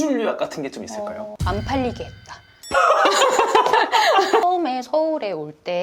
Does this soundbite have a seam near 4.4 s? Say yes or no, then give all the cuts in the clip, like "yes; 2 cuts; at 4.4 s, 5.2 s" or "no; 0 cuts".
yes; 1 cut; at 4.4 s